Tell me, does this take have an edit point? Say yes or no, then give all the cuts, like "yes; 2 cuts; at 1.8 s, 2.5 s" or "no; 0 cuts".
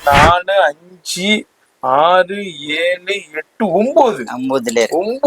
no; 0 cuts